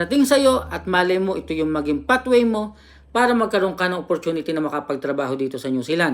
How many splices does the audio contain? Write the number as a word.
zero